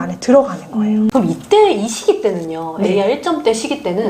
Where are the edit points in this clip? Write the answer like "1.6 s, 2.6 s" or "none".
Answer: 1.1 s